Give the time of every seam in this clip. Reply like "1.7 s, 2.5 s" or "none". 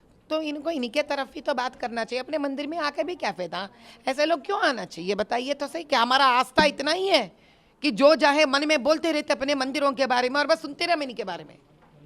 none